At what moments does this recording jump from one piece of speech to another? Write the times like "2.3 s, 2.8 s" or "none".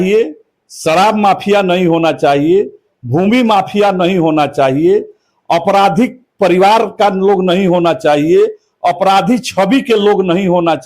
none